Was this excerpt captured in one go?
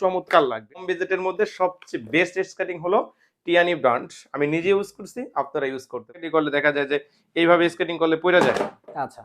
no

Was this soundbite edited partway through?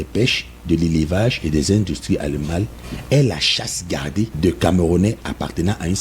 yes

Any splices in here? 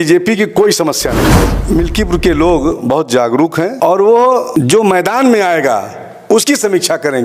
yes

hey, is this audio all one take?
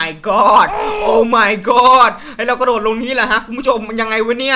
yes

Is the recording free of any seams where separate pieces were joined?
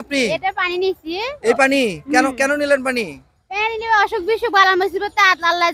yes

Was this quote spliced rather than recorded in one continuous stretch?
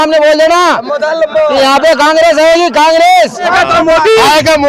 yes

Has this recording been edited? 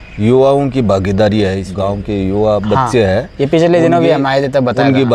yes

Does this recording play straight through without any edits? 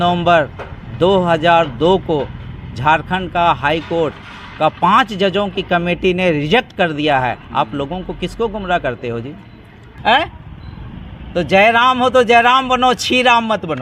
no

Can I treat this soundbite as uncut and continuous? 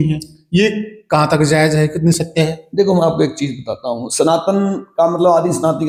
yes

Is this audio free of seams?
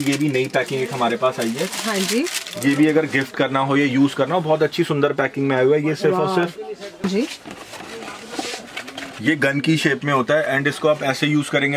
no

